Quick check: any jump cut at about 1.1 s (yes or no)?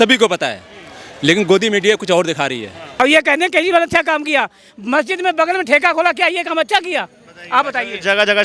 no